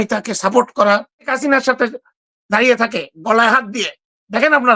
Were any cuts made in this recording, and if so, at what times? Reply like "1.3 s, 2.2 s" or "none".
1.3 s